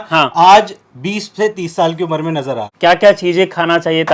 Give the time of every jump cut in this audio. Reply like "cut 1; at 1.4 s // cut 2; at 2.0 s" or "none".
cut 1; at 1.6 s // cut 2; at 2.7 s